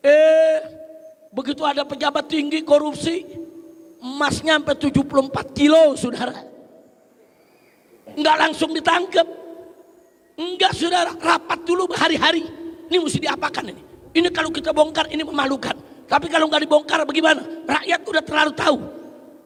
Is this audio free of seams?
yes; 0 cuts

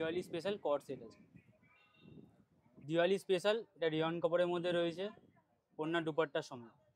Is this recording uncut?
no; 1 cut; at 2.8 s

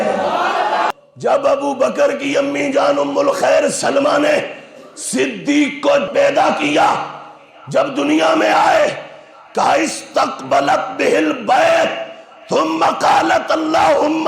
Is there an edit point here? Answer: yes; 2 cuts; at 0.9 s, 6.1 s

